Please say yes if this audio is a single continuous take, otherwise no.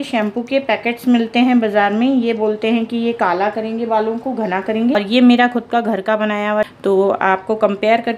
no